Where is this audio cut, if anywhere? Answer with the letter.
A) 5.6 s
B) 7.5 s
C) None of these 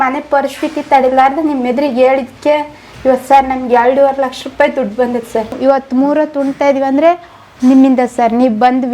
A